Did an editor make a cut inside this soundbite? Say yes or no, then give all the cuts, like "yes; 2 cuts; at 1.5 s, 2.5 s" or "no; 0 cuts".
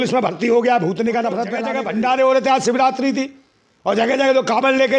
yes; 1 cut; at 1.6 s